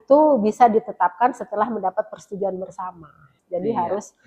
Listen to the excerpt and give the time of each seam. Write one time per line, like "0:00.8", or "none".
0:03.3